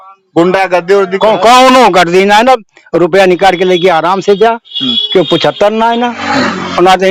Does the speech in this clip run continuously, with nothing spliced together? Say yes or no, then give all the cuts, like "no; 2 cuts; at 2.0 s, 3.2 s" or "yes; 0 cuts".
yes; 0 cuts